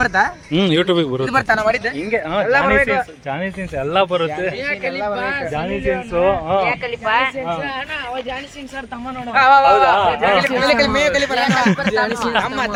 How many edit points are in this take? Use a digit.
0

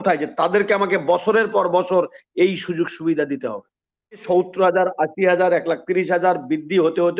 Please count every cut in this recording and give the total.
1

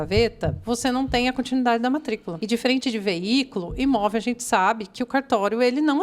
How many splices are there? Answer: 1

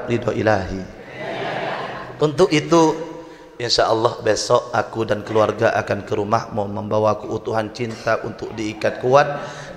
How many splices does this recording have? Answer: 1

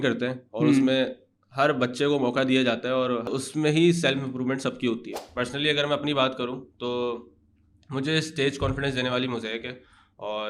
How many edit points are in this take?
2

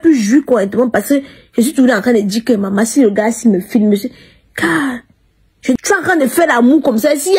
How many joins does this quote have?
1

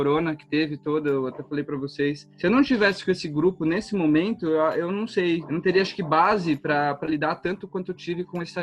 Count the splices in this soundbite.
1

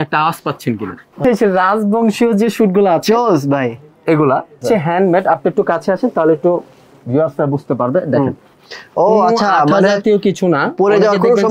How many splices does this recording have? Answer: 2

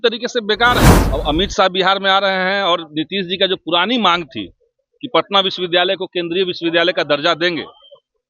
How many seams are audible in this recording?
1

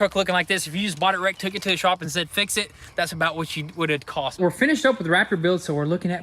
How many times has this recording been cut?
1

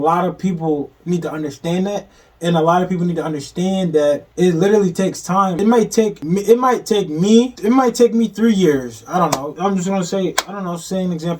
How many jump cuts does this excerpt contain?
4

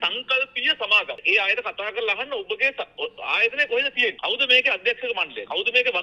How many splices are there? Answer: 1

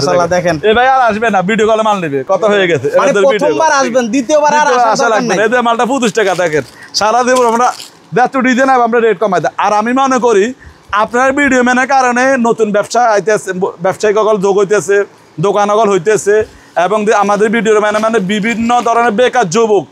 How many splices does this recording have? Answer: 0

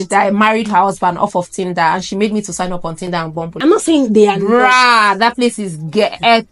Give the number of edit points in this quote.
1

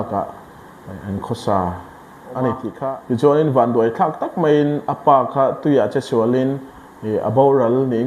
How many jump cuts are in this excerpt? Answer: 1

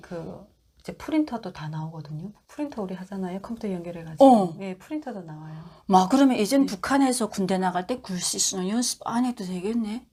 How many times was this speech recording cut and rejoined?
0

